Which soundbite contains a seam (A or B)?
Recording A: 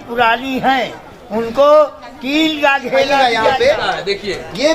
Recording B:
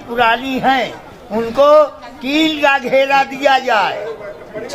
A